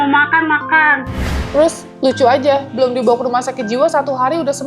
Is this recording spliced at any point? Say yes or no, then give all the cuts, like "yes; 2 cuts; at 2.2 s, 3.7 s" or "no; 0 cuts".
yes; 1 cut; at 1.5 s